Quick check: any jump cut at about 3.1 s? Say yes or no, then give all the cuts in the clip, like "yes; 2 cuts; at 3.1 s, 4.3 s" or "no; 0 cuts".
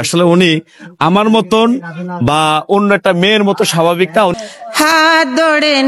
no; 1 cut; at 4.3 s